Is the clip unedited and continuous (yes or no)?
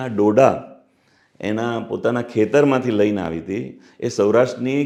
yes